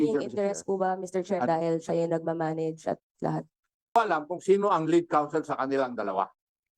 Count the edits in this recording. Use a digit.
1